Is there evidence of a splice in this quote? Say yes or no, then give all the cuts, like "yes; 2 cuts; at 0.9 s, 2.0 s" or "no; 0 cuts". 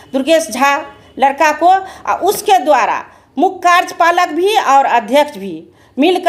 no; 0 cuts